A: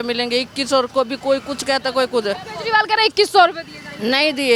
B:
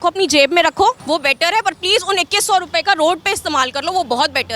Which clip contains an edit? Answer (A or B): B